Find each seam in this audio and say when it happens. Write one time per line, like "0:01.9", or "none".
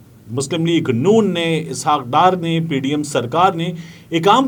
none